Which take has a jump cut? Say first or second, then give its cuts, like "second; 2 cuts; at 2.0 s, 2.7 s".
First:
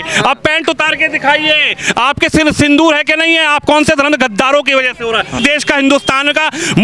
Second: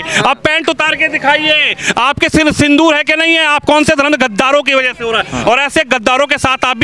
first; 1 cut; at 5.4 s